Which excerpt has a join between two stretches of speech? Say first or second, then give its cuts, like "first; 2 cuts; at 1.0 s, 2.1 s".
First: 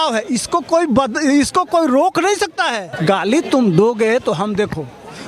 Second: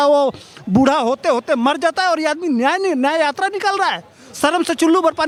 first; 1 cut; at 2.9 s